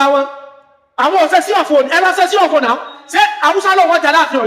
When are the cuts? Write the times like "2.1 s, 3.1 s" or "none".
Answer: 3.0 s